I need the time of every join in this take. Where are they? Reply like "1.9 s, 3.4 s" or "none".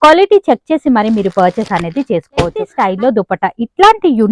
2.8 s